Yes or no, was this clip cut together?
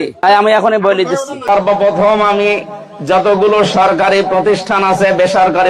yes